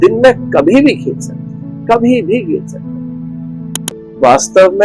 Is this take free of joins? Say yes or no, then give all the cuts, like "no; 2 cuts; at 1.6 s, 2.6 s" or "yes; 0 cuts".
no; 1 cut; at 3.9 s